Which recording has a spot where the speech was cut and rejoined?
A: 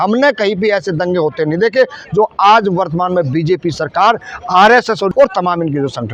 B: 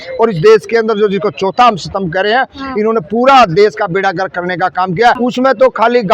B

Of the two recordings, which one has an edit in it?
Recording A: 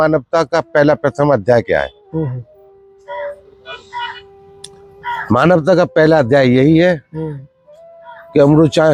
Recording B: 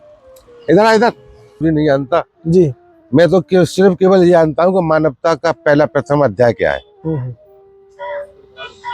B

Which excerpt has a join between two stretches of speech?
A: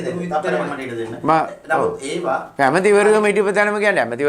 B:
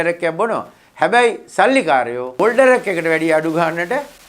B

